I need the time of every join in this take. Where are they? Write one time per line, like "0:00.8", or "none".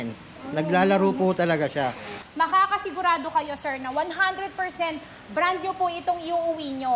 0:02.2